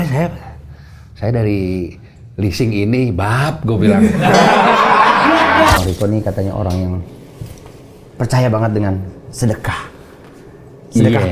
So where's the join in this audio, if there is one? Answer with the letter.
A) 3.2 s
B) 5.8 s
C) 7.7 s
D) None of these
B